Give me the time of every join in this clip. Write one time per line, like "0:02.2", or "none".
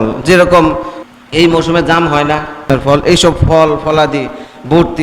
0:00.9
0:02.7